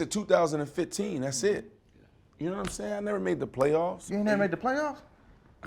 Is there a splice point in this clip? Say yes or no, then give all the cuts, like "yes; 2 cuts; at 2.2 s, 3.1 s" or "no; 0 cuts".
yes; 1 cut; at 4.0 s